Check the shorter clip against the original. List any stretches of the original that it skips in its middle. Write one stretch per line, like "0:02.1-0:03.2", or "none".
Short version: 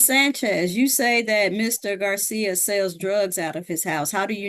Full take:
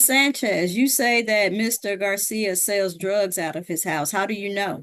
none